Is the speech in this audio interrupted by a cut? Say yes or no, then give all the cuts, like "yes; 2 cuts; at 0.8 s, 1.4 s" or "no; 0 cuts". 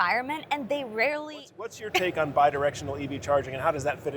yes; 1 cut; at 1.8 s